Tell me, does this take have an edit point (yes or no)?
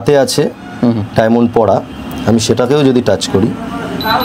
no